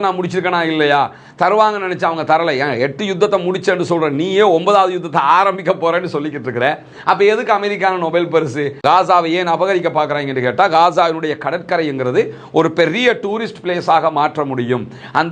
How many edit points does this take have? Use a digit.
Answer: 1